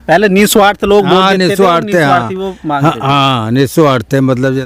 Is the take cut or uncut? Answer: uncut